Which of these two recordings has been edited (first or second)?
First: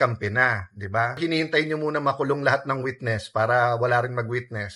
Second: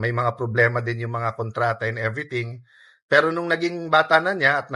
first